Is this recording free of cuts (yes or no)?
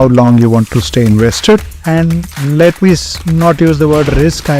no